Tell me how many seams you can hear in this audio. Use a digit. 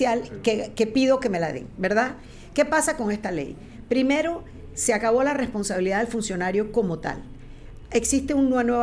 0